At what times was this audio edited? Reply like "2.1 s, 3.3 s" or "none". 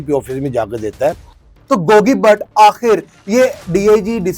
1.3 s